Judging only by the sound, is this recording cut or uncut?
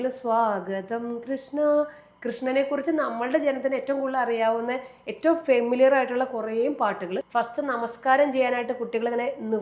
cut